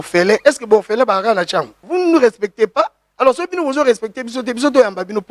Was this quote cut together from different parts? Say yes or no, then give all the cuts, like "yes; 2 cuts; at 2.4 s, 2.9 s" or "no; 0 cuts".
yes; 2 cuts; at 1.8 s, 3.0 s